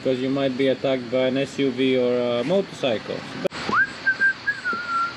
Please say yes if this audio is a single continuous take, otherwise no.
no